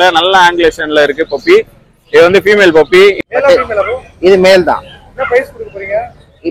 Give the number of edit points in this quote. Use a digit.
1